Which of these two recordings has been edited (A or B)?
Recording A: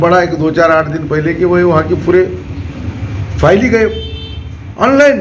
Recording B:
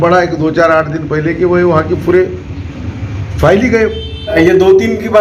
B